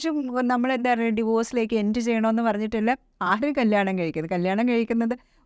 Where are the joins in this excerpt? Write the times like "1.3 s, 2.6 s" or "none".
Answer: none